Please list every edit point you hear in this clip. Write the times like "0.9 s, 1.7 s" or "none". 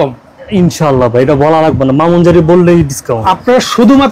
3.2 s